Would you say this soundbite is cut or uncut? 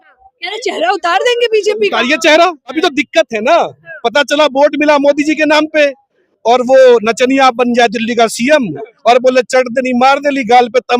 cut